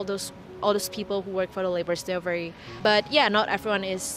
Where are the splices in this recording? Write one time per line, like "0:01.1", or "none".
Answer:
0:02.6